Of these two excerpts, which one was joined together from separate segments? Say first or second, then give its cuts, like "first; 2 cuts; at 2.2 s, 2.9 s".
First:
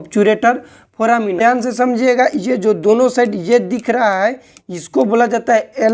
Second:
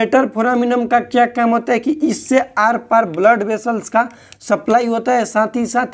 first; 1 cut; at 1.4 s